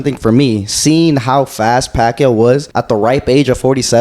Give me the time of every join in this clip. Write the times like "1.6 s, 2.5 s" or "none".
2.7 s